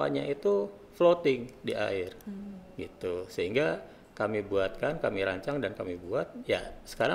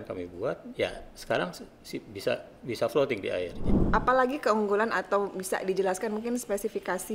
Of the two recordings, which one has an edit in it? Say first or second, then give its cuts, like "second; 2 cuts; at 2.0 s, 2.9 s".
second; 1 cut; at 3.7 s